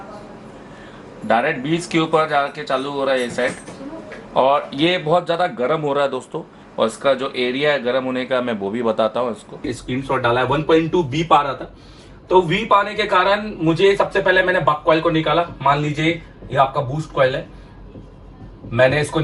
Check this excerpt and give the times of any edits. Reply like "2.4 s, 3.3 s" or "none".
9.7 s